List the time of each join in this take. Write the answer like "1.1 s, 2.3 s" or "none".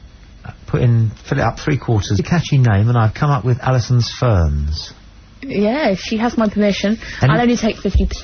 none